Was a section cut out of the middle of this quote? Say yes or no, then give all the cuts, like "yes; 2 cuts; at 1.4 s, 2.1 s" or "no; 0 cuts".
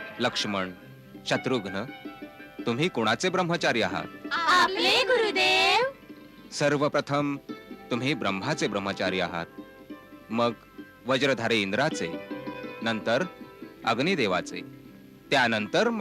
no; 0 cuts